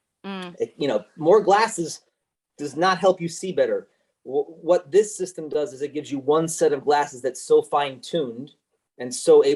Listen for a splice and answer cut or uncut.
uncut